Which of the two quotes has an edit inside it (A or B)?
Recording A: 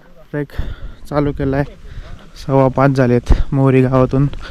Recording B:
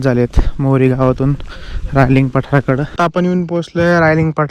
B